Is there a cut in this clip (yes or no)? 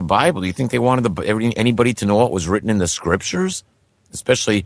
yes